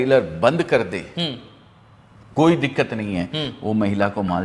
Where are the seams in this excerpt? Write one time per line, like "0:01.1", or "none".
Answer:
none